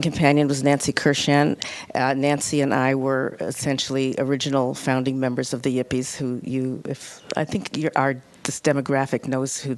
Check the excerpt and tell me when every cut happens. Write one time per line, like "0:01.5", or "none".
0:06.5

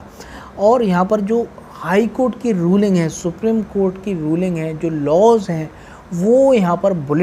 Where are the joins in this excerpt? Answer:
none

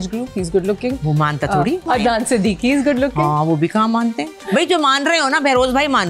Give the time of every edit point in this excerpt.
0:01.9
0:04.4

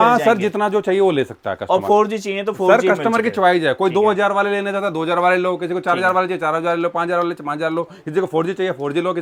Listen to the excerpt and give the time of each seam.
none

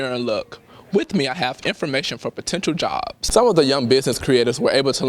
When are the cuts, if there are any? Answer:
0:03.2

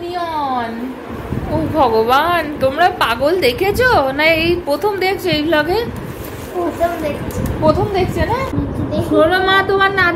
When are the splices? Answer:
0:08.5

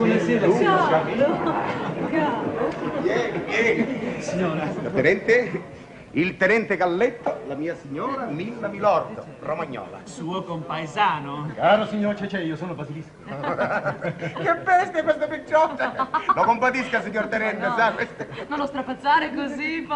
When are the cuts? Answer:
0:10.3

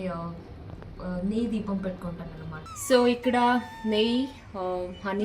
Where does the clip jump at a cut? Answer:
0:02.7

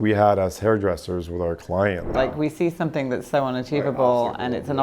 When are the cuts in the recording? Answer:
0:02.2

